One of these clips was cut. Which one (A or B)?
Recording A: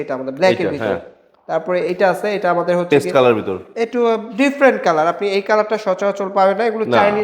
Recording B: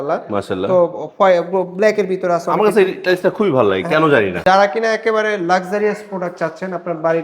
B